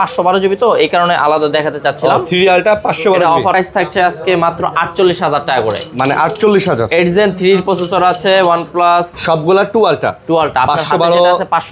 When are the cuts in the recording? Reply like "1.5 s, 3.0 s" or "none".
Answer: 3.5 s, 9.1 s